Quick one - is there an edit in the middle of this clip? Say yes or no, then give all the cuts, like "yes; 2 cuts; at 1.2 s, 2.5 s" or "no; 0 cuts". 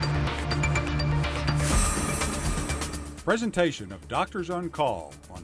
yes; 1 cut; at 3.0 s